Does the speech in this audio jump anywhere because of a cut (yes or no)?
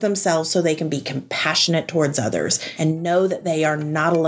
yes